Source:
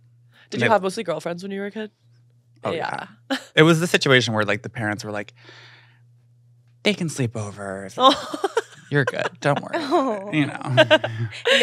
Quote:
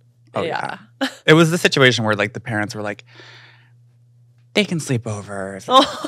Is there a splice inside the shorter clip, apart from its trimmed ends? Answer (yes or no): no